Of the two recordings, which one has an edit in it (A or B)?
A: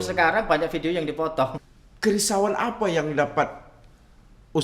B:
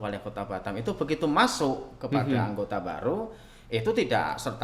A